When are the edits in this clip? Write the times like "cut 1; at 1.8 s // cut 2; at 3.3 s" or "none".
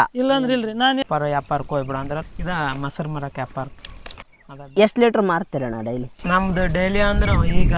cut 1; at 1.0 s